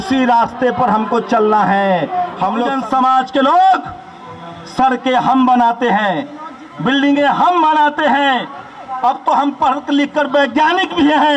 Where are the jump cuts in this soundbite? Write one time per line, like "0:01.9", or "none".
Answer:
0:02.7

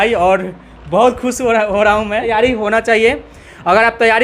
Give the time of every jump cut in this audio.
0:02.3

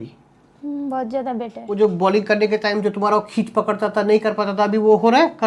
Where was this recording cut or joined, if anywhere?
0:01.8

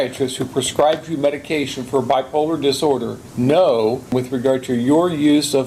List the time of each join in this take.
0:03.2
0:04.1

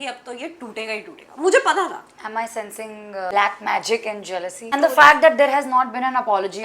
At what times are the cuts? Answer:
0:03.3
0:04.6

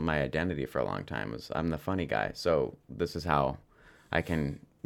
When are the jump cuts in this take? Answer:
none

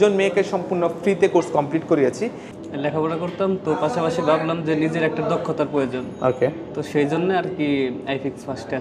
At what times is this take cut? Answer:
0:02.5

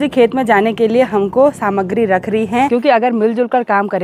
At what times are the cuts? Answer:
0:02.7

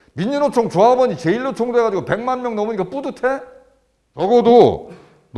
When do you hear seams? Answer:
0:04.3

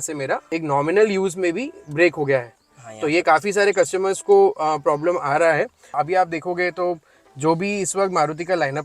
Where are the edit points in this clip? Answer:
0:05.9

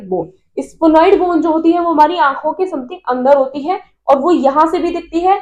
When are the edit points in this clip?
none

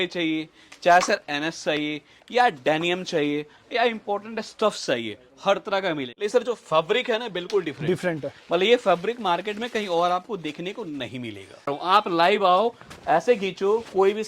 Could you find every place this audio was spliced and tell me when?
0:06.1
0:11.7

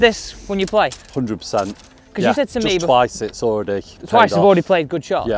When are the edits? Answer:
none

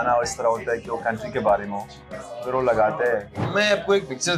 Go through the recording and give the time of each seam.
0:03.4

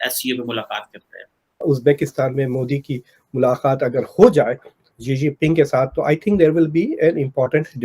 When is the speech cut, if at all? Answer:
0:01.5

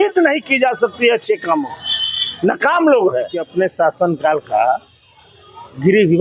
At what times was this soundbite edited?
0:03.5

